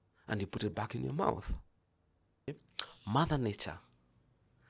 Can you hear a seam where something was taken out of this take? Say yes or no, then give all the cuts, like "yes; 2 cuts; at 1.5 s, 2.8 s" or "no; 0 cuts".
yes; 1 cut; at 2.5 s